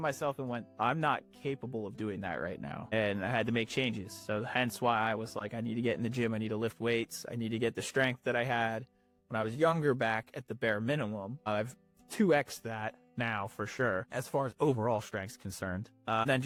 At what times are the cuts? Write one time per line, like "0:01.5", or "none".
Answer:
none